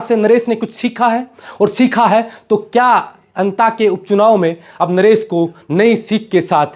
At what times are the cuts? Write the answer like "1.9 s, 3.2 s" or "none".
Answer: none